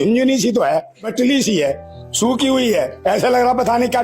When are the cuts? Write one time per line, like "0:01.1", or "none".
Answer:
0:01.1
0:02.9